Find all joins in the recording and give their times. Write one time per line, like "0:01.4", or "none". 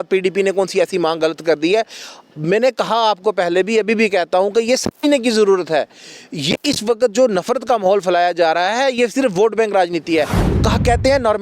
0:10.4